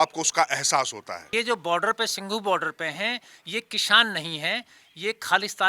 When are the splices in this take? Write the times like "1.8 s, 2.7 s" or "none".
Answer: 1.3 s